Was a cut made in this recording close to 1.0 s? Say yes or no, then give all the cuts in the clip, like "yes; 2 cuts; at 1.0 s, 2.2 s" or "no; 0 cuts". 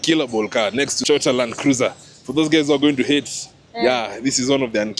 yes; 1 cut; at 1.0 s